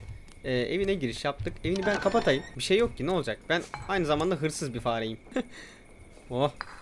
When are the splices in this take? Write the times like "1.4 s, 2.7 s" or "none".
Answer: 2.5 s, 5.3 s